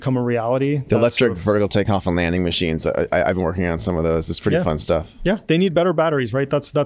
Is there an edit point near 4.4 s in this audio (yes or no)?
no